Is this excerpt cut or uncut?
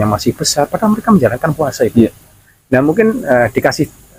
uncut